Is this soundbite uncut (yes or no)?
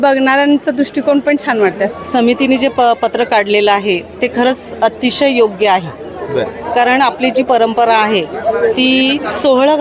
no